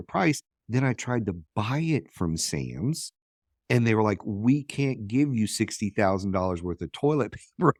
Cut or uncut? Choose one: uncut